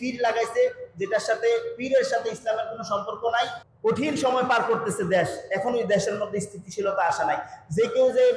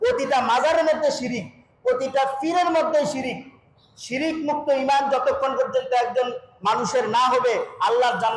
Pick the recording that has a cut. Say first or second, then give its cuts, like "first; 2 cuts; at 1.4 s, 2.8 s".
first; 1 cut; at 3.6 s